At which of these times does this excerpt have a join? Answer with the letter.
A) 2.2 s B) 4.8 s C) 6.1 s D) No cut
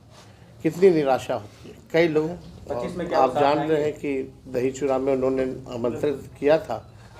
A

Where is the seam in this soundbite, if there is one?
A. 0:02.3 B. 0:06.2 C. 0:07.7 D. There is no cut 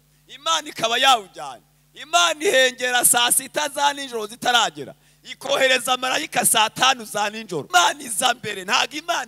C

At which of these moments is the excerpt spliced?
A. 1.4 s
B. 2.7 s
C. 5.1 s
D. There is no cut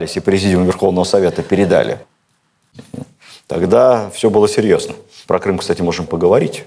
D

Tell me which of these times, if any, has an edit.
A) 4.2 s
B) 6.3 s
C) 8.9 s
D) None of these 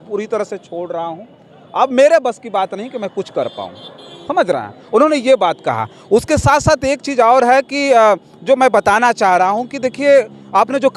D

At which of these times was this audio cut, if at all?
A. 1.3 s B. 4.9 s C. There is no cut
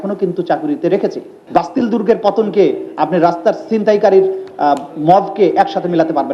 A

